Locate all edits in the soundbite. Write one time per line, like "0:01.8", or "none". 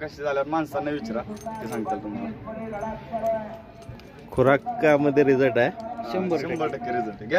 none